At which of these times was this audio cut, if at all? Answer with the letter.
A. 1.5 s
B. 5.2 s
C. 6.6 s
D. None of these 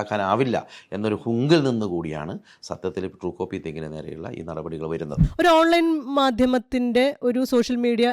B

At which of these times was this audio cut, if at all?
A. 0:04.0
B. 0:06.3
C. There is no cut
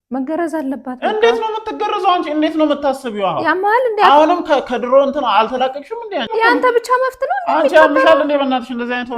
B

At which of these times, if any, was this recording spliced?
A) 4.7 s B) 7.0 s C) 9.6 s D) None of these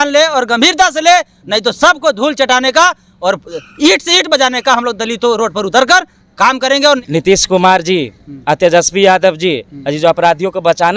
B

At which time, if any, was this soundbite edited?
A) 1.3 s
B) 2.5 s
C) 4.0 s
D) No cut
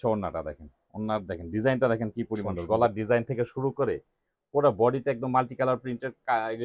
B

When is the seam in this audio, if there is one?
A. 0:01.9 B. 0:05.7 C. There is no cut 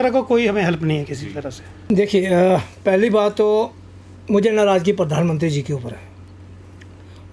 A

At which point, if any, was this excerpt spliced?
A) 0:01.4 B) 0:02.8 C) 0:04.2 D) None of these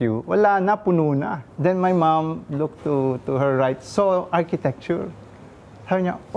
A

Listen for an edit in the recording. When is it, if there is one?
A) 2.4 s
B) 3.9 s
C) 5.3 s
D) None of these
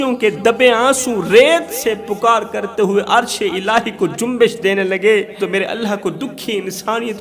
C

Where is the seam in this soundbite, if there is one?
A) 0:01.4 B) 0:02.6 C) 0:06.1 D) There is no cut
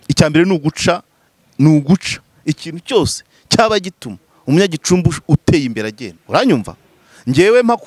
C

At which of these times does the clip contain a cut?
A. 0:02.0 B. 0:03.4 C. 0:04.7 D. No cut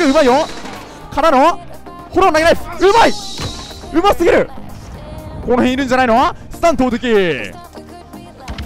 C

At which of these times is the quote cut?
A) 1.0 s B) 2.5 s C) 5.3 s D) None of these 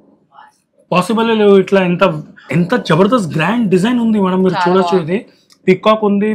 B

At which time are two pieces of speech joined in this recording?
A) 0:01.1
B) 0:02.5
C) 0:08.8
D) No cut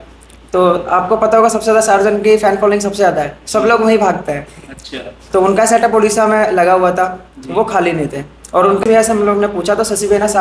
C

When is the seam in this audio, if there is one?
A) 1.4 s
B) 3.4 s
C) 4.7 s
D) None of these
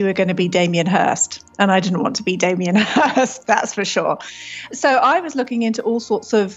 C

